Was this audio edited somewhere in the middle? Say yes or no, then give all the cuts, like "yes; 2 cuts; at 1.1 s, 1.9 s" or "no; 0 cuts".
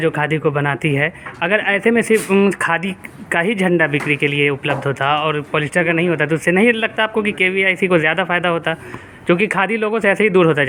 no; 0 cuts